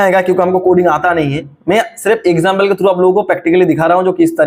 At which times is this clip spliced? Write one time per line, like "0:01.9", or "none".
none